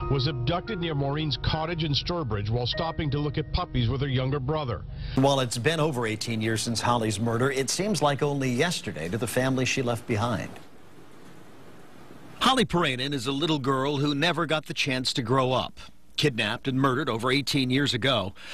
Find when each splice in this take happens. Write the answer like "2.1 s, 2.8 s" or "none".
3.3 s